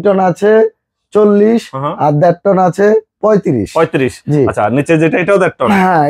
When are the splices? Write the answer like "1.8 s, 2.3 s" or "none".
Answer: none